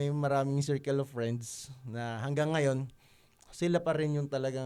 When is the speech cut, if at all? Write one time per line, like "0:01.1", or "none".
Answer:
none